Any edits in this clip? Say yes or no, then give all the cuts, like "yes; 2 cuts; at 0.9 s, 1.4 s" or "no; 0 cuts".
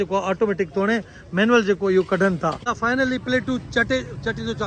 yes; 1 cut; at 2.7 s